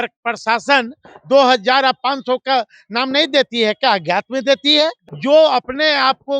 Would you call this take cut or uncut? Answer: cut